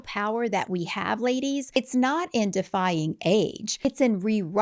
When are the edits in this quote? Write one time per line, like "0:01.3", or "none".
0:01.7
0:03.8